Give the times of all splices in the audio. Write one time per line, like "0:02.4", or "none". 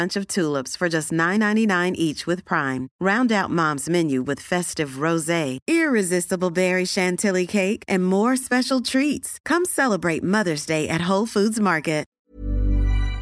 0:12.2